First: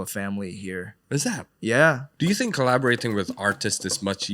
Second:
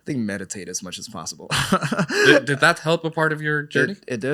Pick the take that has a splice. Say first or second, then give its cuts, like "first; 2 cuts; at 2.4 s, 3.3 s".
first; 2 cuts; at 0.9 s, 2.1 s